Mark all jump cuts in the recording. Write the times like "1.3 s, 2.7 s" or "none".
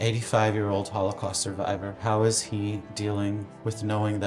2.0 s